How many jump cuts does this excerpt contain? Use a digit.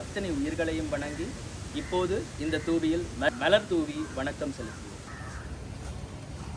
2